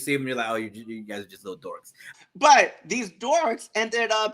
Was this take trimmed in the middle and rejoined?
yes; 1 cut; at 2.1 s

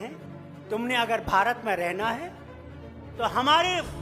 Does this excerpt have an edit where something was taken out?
no; 0 cuts

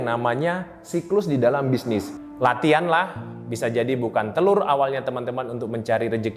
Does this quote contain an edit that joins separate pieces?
yes; 1 cut; at 2.2 s

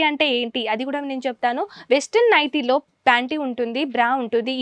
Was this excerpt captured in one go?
yes; 0 cuts

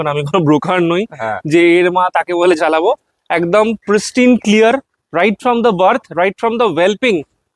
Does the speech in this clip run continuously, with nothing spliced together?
yes; 0 cuts

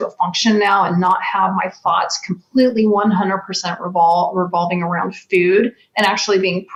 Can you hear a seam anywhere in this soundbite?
no; 0 cuts

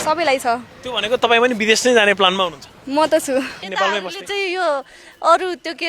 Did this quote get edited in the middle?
yes; 1 cut; at 3.6 s

